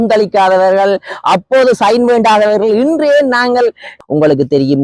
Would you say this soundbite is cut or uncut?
cut